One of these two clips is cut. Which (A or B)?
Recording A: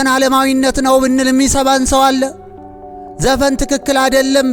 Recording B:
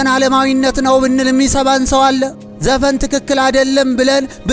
B